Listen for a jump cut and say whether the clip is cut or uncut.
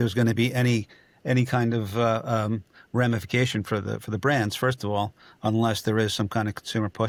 uncut